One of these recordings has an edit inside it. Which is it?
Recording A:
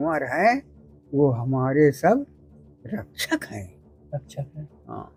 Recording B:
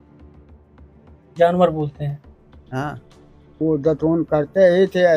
B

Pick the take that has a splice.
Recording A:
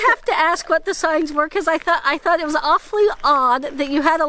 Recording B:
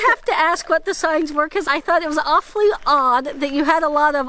B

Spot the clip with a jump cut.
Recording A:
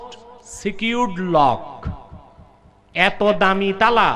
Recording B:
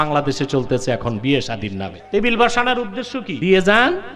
B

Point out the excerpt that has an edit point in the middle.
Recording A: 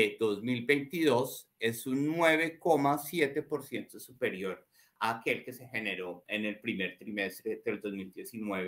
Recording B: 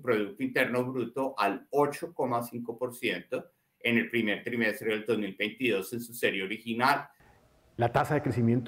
B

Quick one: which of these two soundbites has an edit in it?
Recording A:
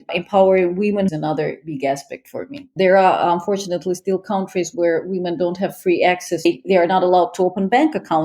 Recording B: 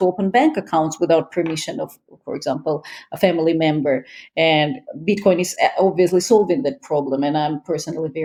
A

